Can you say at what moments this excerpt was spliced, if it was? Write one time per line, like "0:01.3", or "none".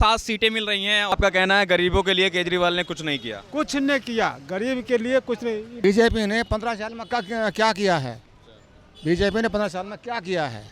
0:01.1
0:05.7

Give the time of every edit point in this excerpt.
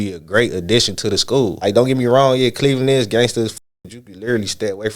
0:01.6

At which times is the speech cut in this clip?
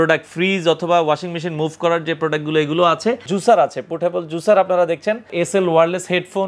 0:03.3
0:05.3

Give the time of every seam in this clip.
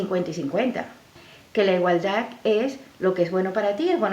0:01.2

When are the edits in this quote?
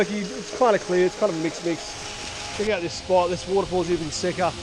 0:02.6

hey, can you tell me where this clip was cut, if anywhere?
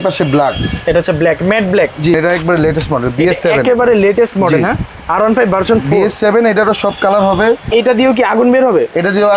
0:02.1
0:07.7

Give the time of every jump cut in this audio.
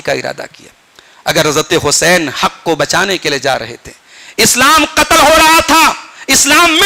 none

